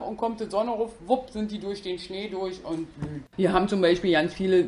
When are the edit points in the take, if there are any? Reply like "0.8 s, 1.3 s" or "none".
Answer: 3.3 s